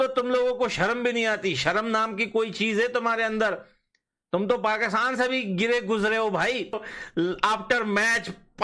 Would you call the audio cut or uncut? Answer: cut